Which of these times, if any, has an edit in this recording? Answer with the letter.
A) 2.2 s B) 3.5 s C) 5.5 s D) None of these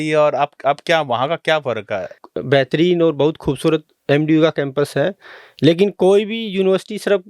A